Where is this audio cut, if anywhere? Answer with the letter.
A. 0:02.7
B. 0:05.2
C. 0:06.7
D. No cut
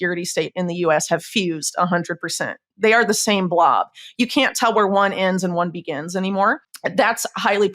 C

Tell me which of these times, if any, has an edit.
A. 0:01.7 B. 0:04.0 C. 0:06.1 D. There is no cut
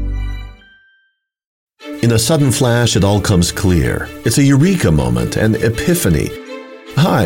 A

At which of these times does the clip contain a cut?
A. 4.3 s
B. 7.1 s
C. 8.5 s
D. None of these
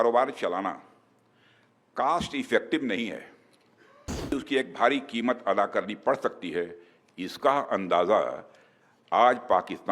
A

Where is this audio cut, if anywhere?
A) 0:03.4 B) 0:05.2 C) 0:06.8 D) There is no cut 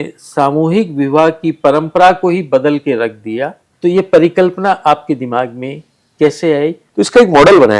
C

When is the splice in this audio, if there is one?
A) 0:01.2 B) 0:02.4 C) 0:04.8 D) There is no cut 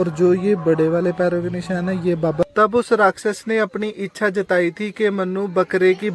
B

